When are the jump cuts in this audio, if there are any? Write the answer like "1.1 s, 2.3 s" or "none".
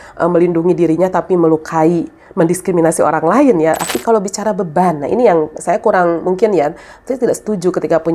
3.8 s